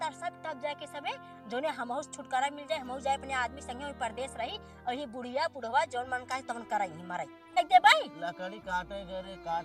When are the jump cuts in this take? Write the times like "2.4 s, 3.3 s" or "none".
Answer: 7.6 s